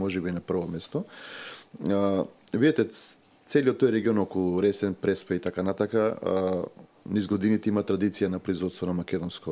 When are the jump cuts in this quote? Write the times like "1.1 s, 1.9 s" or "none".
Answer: none